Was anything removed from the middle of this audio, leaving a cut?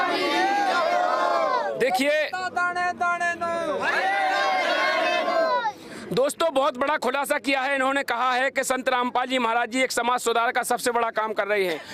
no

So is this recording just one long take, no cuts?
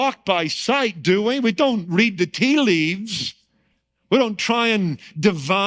yes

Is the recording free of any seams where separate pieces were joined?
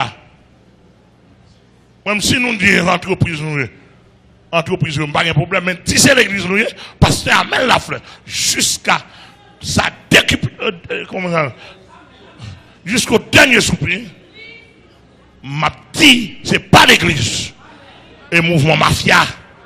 yes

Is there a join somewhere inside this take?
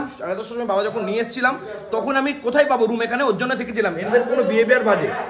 no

